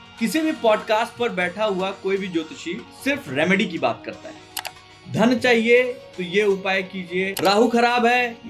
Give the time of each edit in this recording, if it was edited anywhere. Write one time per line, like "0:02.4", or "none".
0:07.3